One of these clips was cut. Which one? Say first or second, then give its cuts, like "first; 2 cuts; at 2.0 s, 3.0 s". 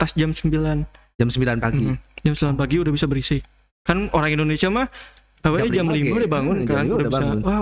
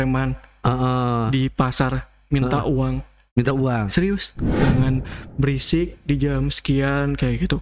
second; 1 cut; at 4.6 s